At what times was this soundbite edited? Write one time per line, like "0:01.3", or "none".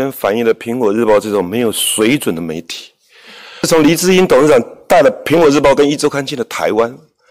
0:03.6